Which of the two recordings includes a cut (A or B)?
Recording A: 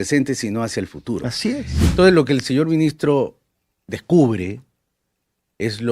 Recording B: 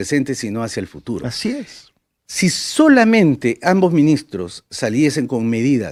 A